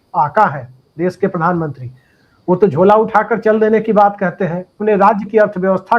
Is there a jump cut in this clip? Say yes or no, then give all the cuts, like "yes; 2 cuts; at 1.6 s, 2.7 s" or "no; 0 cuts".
yes; 1 cut; at 4.7 s